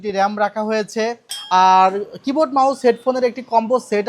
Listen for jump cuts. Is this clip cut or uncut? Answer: cut